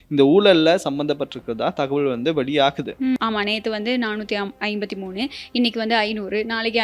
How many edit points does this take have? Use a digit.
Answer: 1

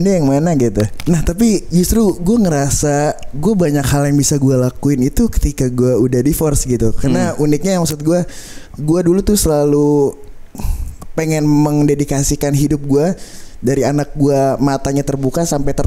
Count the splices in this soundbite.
1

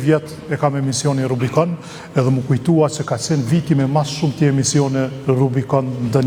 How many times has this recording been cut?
0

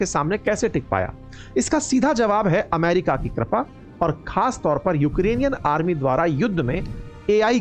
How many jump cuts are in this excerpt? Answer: 0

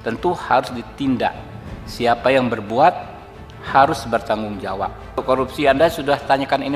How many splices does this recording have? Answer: 1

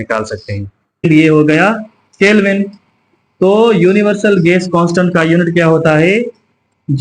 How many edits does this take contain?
1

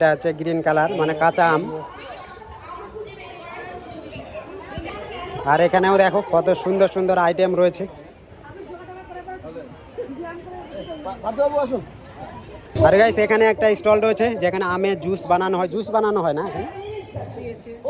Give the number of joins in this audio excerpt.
0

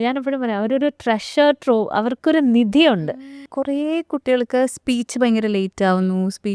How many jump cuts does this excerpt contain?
1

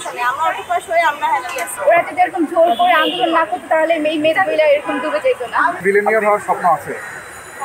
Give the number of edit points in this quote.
2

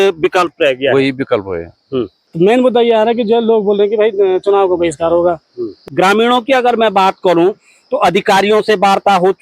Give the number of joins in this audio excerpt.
2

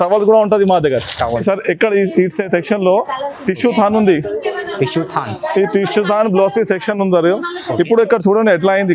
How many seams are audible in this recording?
1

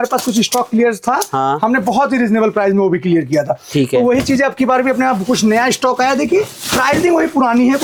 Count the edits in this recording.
0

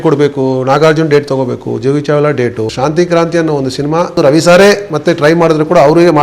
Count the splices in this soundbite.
2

